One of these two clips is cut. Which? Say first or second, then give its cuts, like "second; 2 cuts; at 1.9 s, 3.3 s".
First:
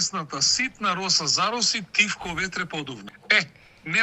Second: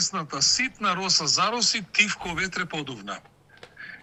first; 1 cut; at 3.0 s